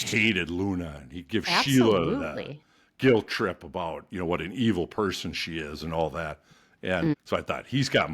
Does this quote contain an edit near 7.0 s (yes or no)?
yes